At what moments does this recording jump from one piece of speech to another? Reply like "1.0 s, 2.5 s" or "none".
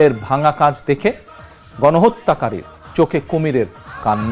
none